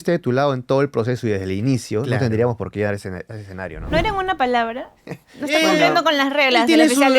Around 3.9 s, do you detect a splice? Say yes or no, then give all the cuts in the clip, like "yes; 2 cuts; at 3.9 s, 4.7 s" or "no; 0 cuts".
yes; 1 cut; at 3.9 s